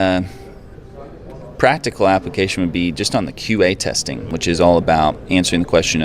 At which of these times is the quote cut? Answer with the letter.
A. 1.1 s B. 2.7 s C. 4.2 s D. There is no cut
C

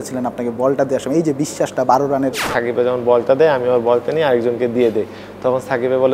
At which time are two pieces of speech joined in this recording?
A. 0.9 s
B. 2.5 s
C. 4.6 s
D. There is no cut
B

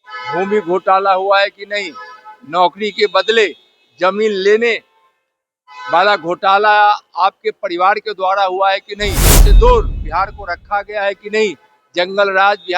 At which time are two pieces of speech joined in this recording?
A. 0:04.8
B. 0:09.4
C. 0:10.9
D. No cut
B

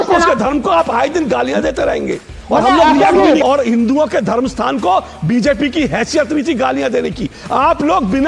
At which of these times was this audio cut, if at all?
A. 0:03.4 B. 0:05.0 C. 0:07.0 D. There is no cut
A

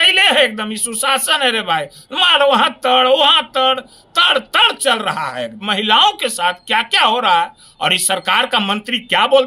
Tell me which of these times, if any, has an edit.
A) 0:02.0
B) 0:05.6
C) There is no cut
B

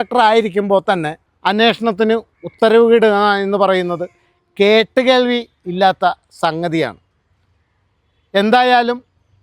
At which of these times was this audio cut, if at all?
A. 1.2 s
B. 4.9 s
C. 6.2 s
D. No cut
A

